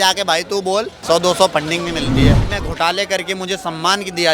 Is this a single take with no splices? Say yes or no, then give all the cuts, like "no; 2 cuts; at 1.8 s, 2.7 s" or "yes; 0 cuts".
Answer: no; 2 cuts; at 0.9 s, 2.5 s